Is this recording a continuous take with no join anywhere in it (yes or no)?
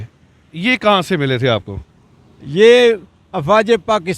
yes